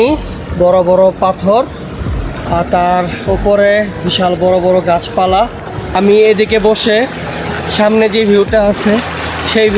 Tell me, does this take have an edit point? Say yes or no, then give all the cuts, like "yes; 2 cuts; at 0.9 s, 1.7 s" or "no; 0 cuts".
yes; 1 cut; at 5.8 s